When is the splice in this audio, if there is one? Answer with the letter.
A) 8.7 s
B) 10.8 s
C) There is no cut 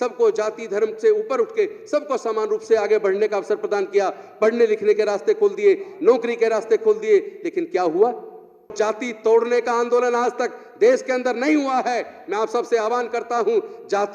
A